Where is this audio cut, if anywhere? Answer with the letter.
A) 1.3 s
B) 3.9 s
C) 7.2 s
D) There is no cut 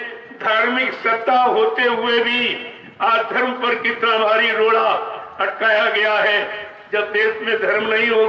D